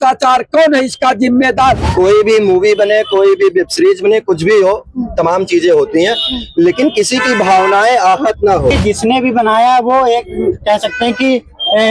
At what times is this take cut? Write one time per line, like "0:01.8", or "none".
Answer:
0:01.8
0:08.7